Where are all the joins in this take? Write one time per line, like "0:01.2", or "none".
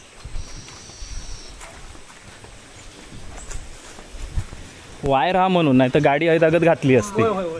none